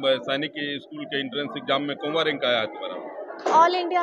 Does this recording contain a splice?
no; 0 cuts

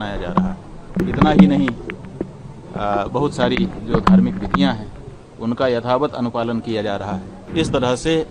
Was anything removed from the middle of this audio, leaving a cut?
yes; 2 cuts; at 1.0 s, 7.4 s

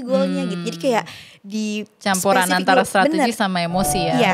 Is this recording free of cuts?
yes; 0 cuts

